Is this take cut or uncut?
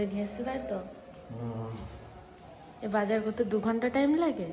uncut